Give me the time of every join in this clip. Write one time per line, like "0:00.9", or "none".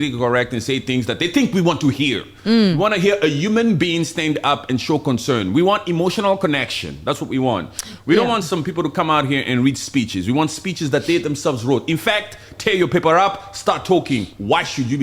none

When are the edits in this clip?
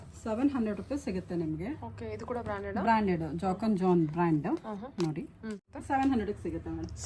0:05.7

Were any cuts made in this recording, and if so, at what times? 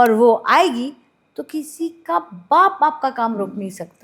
none

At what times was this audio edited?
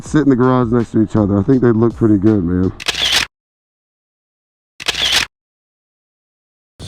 none

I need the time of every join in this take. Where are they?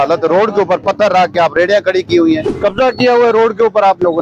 0:02.5

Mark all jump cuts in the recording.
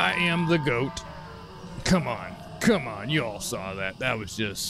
none

